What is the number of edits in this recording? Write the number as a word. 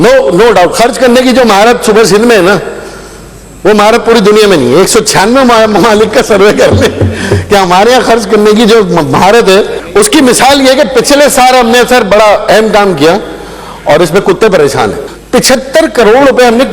two